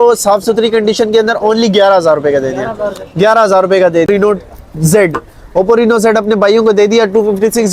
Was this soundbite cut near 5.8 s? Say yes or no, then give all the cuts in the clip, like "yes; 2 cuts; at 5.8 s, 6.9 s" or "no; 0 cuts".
no; 1 cut; at 4.1 s